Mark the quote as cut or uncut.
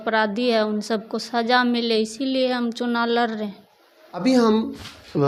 uncut